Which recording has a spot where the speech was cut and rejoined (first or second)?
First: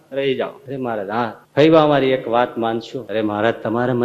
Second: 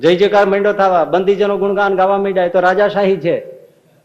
first